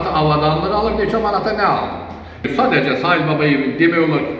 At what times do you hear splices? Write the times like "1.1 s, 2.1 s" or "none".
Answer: 2.5 s